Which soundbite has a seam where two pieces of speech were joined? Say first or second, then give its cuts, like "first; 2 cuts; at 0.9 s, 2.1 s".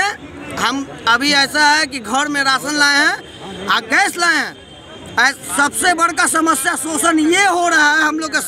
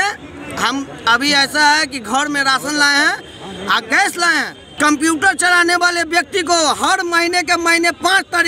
second; 1 cut; at 4.6 s